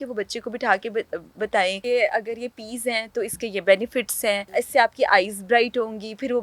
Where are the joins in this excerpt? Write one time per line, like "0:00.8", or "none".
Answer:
0:01.8
0:04.4